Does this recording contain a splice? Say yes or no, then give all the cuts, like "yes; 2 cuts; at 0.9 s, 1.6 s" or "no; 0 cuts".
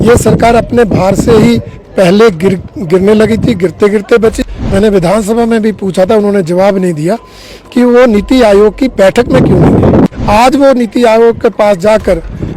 yes; 2 cuts; at 4.4 s, 10.1 s